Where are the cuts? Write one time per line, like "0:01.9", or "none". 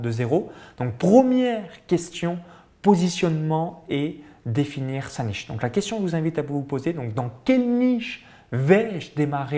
none